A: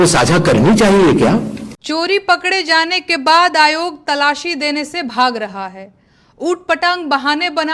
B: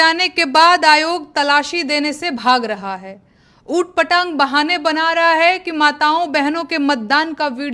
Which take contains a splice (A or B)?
A